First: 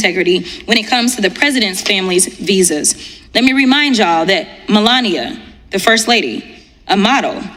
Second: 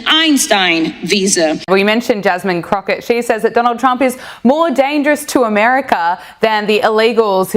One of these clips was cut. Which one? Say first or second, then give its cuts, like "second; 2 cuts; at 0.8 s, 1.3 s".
second; 1 cut; at 1.6 s